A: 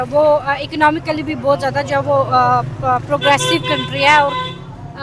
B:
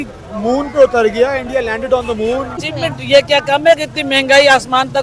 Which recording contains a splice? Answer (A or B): B